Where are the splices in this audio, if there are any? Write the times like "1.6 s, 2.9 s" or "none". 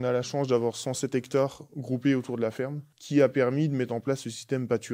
2.9 s